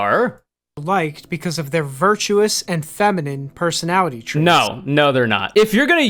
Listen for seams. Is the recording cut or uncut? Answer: uncut